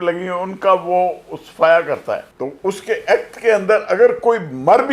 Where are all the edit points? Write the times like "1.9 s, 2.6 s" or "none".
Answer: 2.3 s